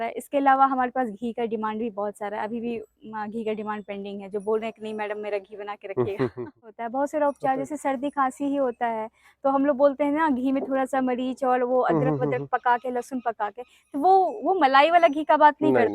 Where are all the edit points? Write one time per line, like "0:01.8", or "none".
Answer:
0:06.8